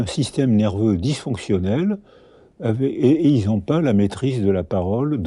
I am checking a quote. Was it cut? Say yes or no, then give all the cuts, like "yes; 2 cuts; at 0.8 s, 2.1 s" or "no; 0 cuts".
no; 0 cuts